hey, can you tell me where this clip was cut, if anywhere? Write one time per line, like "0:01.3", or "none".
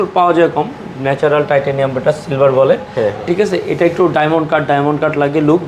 none

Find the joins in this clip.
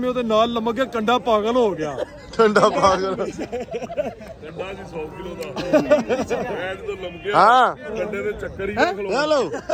none

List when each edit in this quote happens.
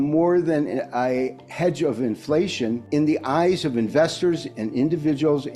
0:02.8

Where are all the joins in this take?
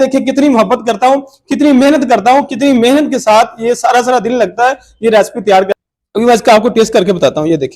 0:05.7

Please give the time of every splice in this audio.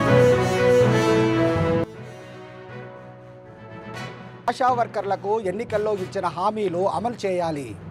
0:01.7

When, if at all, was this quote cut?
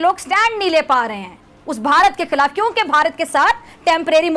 none

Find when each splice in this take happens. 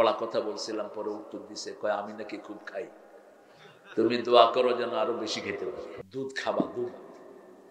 0:06.0

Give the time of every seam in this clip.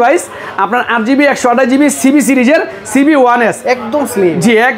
none

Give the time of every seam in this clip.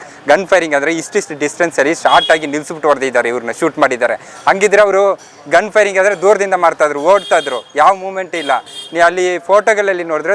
none

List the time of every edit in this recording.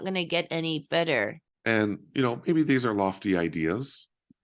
0:01.5

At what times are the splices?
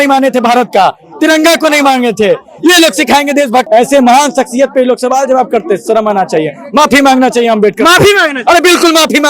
0:03.7

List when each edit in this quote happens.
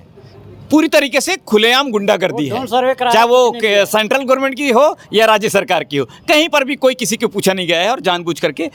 none

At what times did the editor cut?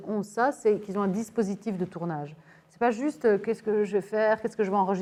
none

